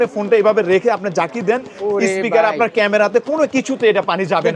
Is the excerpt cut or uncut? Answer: uncut